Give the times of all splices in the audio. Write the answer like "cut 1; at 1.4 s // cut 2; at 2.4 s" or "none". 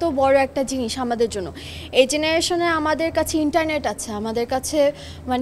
none